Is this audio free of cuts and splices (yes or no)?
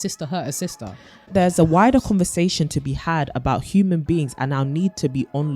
no